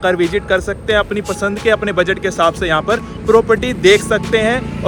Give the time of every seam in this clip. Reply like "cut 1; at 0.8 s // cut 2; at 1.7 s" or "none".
none